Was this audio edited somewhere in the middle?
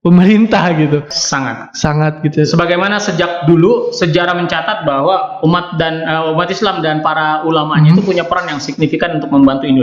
yes; 1 cut; at 1.1 s

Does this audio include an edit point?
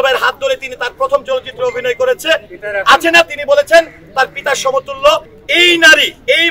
yes; 1 cut; at 5.4 s

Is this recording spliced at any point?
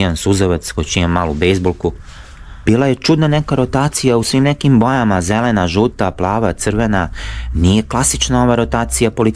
yes; 1 cut; at 2.6 s

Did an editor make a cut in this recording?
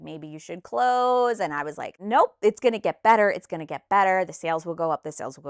yes; 1 cut; at 2.0 s

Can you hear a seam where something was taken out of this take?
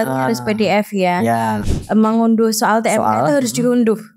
yes; 1 cut; at 1.6 s

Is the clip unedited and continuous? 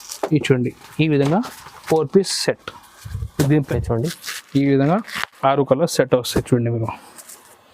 no; 1 cut; at 3.7 s

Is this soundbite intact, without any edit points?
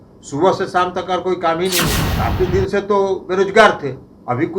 no; 1 cut; at 2.0 s

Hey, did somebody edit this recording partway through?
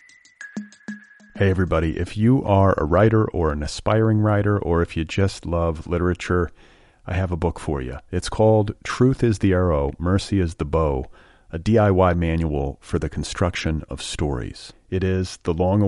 yes; 1 cut; at 0.9 s

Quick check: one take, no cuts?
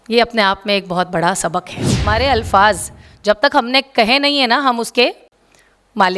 no; 1 cut; at 2.0 s

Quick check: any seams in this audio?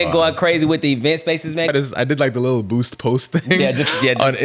yes; 1 cut; at 1.7 s

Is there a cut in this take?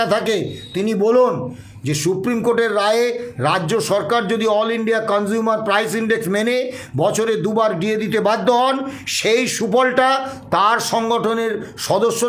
no; 0 cuts

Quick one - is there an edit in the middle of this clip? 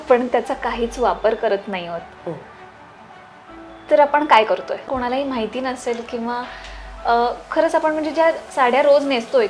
yes; 1 cut; at 5.0 s

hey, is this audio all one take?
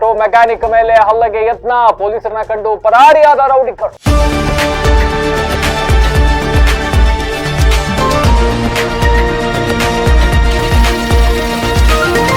no; 1 cut; at 3.9 s

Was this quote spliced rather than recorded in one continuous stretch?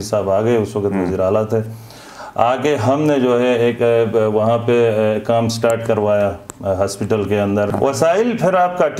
yes; 1 cut; at 7.7 s

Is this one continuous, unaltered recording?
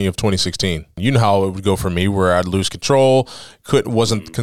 no; 1 cut; at 1.0 s

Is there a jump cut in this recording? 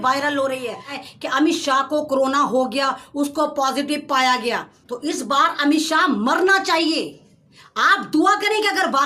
yes; 2 cuts; at 1.0 s, 4.8 s

